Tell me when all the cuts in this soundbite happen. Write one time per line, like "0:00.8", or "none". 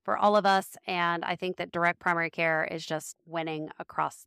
0:03.1